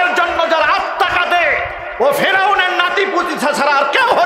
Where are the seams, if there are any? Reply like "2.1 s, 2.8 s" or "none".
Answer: none